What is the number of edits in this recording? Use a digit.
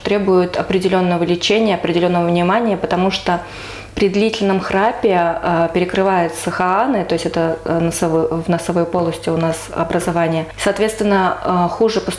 1